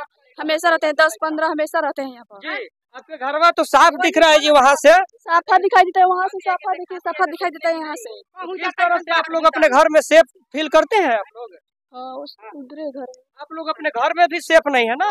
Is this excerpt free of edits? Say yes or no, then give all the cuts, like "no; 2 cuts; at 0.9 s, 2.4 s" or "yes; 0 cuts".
yes; 0 cuts